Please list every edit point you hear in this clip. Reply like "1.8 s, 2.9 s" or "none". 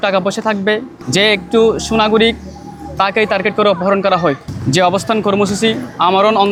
none